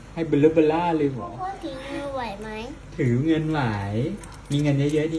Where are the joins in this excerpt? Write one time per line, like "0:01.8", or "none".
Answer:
0:01.3

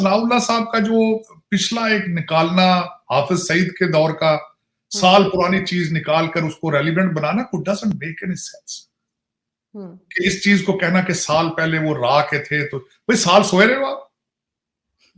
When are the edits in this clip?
none

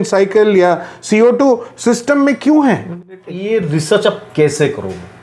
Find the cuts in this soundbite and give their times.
0:03.2

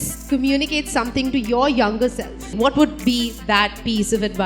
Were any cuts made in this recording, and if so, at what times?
0:02.5

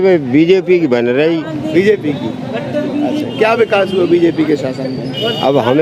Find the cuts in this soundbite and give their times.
none

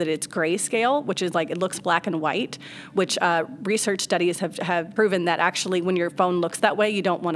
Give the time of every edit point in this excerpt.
0:04.9

